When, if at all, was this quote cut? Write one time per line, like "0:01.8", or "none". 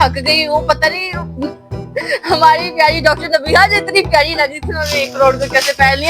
none